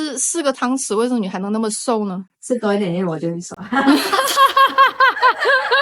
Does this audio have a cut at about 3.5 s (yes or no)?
yes